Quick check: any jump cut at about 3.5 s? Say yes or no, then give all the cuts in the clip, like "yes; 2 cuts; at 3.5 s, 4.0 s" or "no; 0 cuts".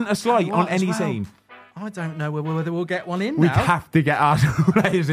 no; 0 cuts